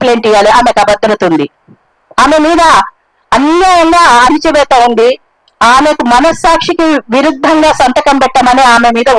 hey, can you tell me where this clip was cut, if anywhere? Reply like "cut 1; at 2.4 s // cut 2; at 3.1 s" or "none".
none